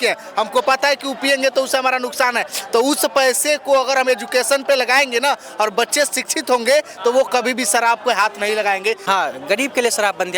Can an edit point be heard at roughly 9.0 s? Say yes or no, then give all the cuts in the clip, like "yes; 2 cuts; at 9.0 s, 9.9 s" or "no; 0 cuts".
yes; 1 cut; at 9.0 s